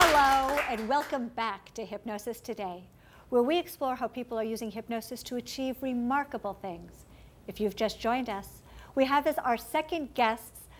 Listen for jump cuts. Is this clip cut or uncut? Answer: cut